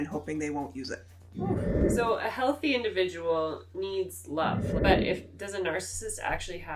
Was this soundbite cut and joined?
yes; 2 cuts; at 1.8 s, 4.7 s

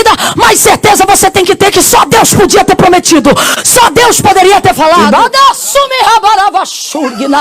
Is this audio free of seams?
no; 1 cut; at 5.0 s

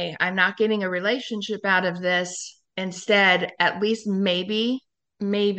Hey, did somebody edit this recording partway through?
no; 0 cuts

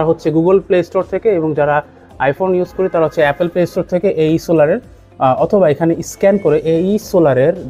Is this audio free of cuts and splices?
yes; 0 cuts

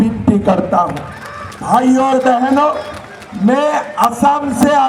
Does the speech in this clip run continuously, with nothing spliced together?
yes; 0 cuts

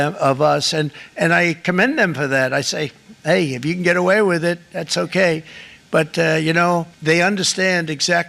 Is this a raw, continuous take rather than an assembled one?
no; 1 cut; at 6.9 s

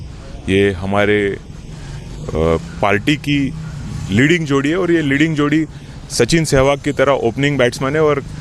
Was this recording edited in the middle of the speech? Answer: no; 0 cuts

